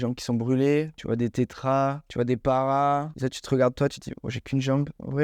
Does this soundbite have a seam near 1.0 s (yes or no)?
yes